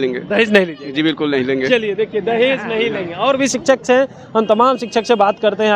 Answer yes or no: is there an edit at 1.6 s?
no